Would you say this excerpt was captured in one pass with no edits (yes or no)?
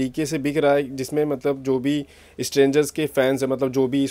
yes